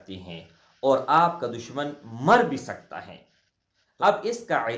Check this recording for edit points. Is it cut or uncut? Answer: cut